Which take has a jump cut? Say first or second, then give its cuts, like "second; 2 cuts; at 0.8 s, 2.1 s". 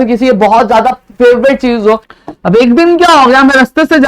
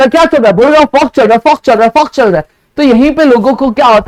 first; 1 cut; at 2.1 s